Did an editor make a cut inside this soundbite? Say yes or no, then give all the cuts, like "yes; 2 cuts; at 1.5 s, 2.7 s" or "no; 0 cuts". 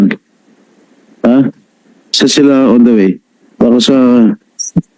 no; 0 cuts